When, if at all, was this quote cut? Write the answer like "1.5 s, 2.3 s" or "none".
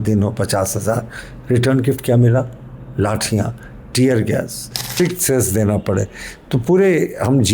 5.0 s